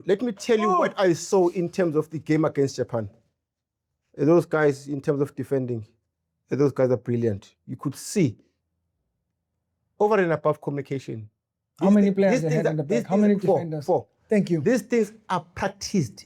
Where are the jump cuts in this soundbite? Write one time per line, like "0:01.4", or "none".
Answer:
none

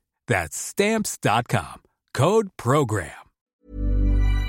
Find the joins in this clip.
0:03.5

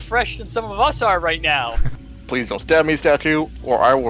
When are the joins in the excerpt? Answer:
0:02.0

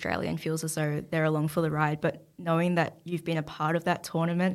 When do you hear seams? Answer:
none

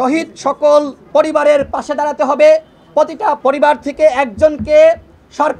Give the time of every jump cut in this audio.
0:01.0
0:03.4

